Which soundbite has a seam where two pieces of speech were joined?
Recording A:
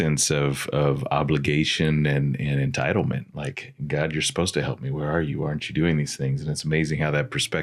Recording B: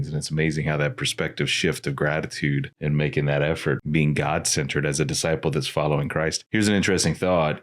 B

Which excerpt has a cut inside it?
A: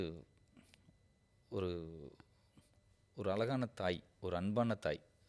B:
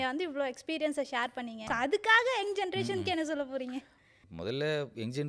B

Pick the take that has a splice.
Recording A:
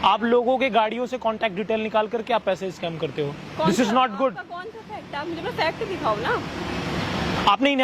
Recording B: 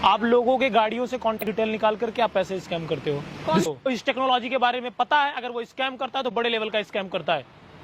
B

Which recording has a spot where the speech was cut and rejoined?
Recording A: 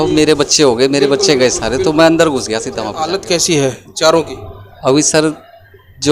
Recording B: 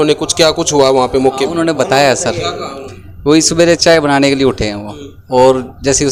A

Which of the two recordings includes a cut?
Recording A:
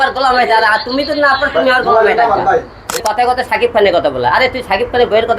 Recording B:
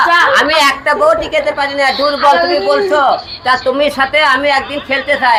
A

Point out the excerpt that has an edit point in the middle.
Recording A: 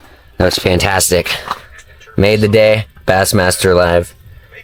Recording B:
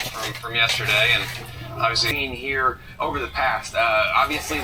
B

